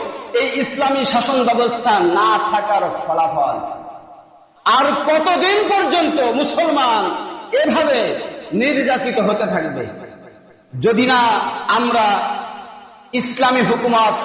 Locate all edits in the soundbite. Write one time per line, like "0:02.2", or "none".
none